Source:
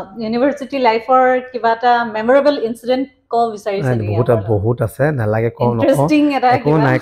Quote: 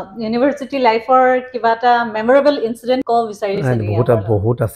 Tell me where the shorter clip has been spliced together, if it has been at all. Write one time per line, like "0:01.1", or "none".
0:03.3